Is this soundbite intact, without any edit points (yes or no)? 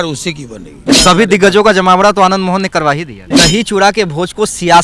no